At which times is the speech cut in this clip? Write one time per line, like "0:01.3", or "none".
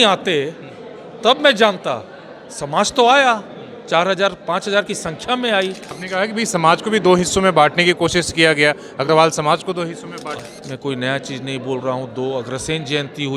0:05.9
0:10.4